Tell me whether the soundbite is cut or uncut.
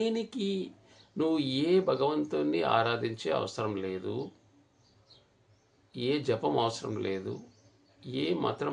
uncut